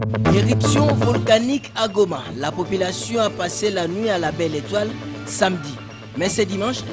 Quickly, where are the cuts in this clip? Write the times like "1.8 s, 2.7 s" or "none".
0.9 s